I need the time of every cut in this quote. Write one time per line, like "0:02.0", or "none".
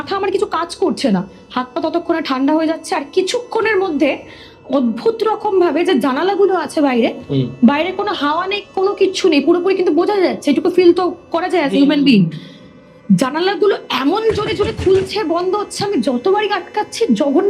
none